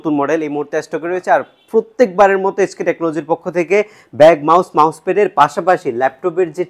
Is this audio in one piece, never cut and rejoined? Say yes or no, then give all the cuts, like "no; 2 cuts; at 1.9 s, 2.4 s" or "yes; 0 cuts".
yes; 0 cuts